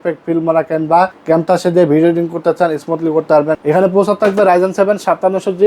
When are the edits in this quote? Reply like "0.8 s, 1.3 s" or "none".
1.2 s, 3.6 s